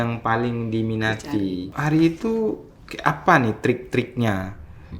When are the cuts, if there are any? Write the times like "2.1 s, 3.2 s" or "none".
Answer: 1.7 s